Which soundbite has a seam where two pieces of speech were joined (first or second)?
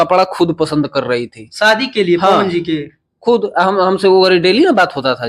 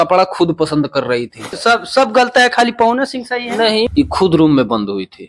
second